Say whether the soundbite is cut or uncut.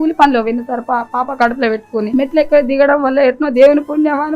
cut